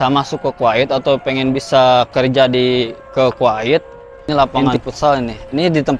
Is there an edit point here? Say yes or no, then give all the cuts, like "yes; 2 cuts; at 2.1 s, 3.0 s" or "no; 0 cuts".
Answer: yes; 1 cut; at 4.3 s